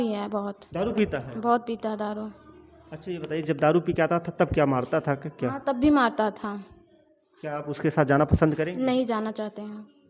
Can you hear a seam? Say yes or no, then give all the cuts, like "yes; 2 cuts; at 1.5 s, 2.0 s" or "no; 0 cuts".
no; 0 cuts